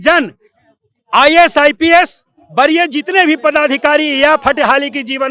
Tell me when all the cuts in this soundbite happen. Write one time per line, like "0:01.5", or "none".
none